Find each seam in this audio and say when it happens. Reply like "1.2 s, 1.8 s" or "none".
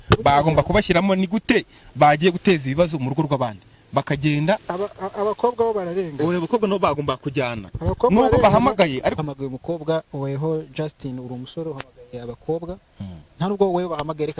9.2 s